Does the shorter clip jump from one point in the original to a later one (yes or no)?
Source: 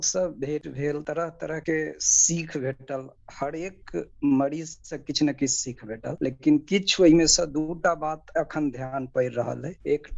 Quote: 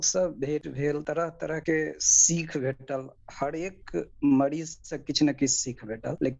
no